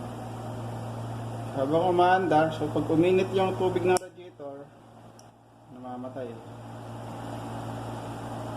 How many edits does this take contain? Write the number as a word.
one